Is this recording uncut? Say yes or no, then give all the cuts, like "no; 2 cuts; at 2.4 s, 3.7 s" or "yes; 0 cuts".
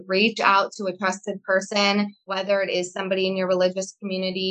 no; 1 cut; at 2.2 s